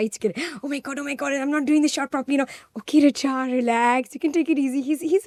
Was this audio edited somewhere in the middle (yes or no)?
no